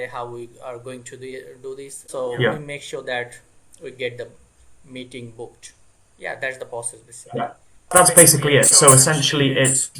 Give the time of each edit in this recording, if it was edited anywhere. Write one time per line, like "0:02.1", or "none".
0:02.0
0:07.7